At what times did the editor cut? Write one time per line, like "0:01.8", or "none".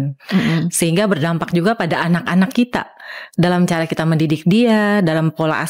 none